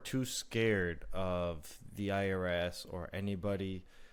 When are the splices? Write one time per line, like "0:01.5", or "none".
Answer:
none

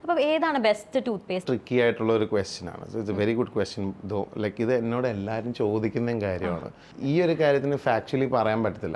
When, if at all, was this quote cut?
0:01.4
0:06.9

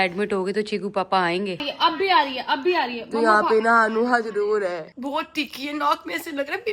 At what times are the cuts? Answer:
0:01.5
0:04.9

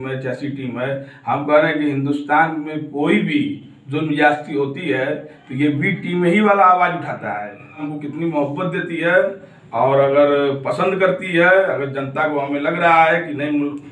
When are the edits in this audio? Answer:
0:07.9

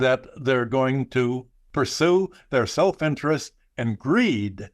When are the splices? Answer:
0:01.6

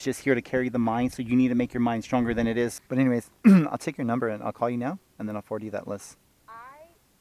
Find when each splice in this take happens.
0:02.7

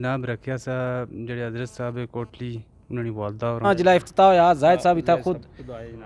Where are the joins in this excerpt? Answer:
0:03.6

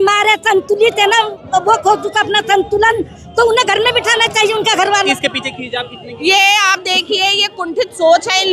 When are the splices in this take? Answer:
0:05.1

